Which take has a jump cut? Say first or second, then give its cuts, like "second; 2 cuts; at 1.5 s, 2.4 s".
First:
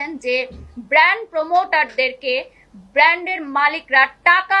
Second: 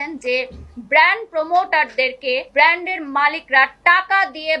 second; 1 cut; at 2.5 s